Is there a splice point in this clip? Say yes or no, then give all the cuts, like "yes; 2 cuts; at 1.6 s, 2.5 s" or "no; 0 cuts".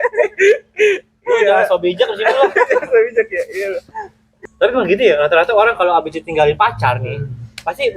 yes; 1 cut; at 4.3 s